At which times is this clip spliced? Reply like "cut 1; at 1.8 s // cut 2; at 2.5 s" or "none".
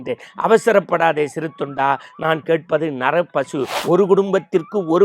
cut 1; at 3.8 s